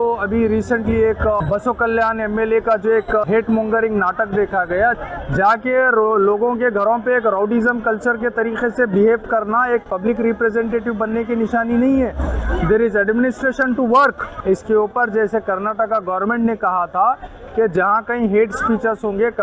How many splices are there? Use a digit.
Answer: 4